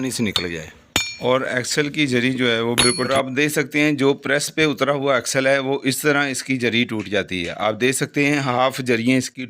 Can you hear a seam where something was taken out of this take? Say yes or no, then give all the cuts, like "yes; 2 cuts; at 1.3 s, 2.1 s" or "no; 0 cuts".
yes; 1 cut; at 3.1 s